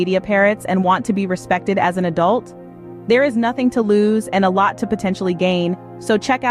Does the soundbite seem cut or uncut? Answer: uncut